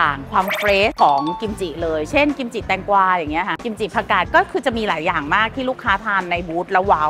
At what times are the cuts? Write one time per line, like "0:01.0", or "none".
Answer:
none

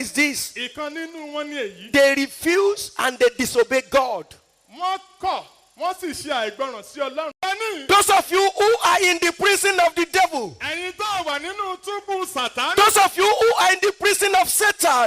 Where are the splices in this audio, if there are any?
0:07.3

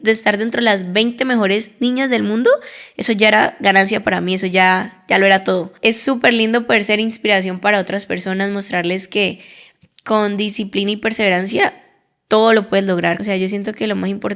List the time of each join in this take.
0:05.7
0:13.2

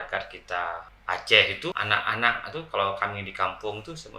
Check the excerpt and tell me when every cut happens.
0:00.9
0:01.7

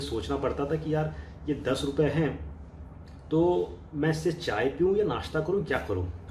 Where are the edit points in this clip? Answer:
none

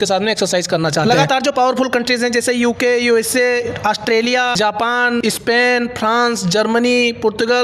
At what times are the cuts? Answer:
none

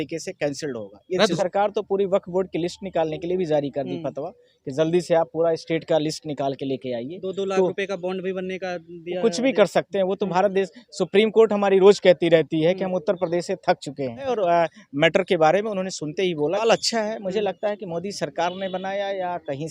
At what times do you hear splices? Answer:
0:01.3
0:14.3
0:16.6

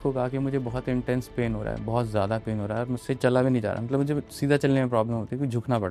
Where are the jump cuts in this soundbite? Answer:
none

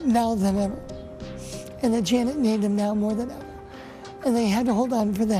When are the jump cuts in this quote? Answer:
none

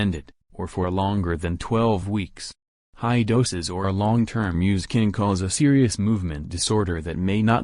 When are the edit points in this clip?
0:04.7

